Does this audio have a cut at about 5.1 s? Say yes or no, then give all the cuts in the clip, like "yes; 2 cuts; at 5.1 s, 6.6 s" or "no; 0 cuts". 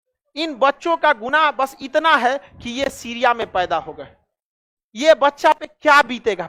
no; 0 cuts